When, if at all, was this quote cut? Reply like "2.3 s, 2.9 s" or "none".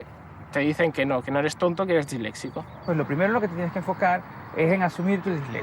2.8 s